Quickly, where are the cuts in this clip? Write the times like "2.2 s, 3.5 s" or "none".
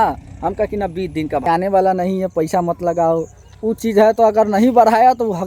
1.4 s